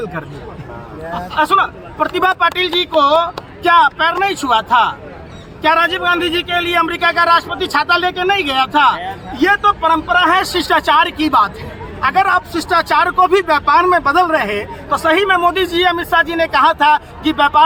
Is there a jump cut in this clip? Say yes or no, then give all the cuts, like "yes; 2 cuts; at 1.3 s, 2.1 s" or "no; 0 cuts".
no; 0 cuts